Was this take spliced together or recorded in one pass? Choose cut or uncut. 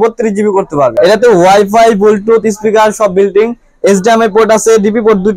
cut